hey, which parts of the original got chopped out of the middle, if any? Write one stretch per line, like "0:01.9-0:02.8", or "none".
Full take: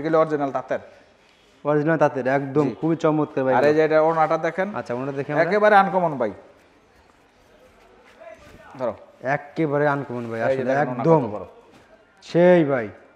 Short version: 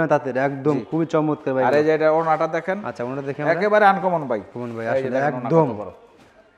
0:06.5-0:10.2